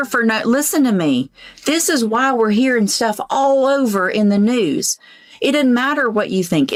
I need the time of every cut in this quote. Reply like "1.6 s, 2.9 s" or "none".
none